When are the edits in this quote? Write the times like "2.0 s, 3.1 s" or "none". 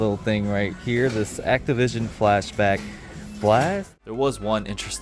3.8 s